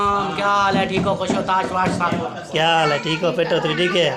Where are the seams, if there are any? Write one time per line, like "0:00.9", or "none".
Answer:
0:02.3